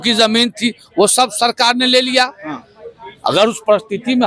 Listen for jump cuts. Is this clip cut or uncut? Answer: uncut